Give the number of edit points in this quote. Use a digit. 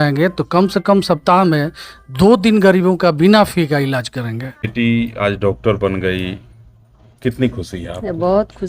1